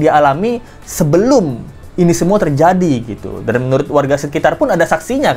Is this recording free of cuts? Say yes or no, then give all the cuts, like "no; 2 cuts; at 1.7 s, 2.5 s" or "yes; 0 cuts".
yes; 0 cuts